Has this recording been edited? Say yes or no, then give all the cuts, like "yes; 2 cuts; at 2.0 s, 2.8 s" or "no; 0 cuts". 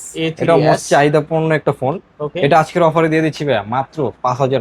no; 0 cuts